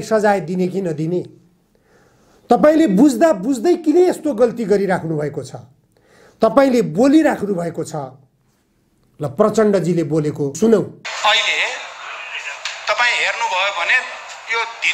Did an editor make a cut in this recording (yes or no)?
no